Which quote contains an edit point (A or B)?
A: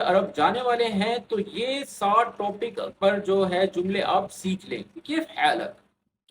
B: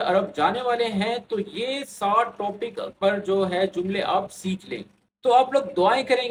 A